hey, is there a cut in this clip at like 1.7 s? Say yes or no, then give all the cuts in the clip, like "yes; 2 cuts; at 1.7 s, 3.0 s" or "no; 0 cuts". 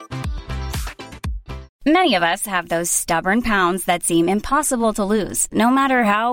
yes; 1 cut; at 1.7 s